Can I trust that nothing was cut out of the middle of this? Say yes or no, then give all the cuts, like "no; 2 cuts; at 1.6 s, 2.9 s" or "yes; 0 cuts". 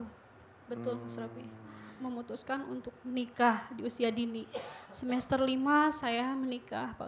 no; 1 cut; at 1.9 s